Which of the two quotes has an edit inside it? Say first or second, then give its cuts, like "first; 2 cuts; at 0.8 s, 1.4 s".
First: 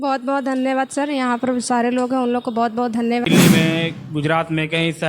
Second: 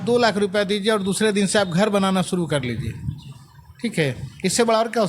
first; 1 cut; at 3.3 s